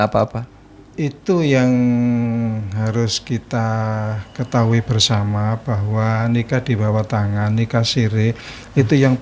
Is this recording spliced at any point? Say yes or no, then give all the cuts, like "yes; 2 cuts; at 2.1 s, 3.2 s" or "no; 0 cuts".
no; 0 cuts